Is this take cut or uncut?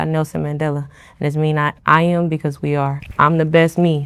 cut